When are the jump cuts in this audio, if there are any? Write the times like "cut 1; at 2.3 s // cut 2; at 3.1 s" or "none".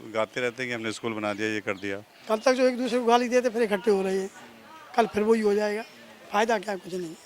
cut 1; at 2.1 s